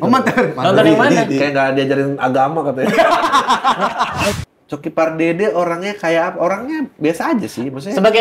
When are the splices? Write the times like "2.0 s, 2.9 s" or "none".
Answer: 4.3 s